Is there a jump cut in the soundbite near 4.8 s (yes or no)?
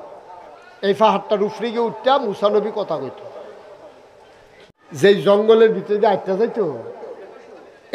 yes